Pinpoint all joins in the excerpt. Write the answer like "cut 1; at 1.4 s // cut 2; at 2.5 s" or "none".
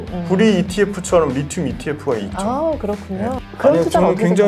cut 1; at 3.4 s